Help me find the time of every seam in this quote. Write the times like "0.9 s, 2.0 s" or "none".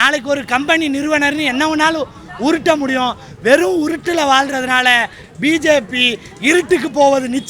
none